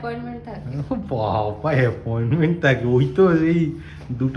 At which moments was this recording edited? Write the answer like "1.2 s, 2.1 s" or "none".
none